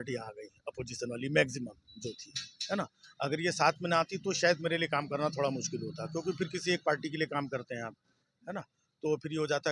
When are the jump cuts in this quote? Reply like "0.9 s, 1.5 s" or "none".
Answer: none